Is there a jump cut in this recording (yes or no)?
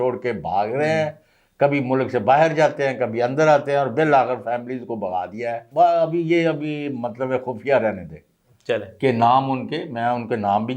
yes